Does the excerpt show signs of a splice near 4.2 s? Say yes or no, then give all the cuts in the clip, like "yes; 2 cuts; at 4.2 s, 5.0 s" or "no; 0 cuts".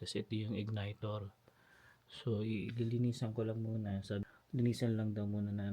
yes; 1 cut; at 4.2 s